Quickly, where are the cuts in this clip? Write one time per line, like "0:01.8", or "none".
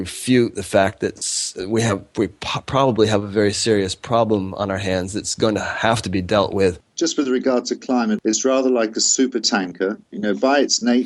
0:06.9
0:08.2
0:10.1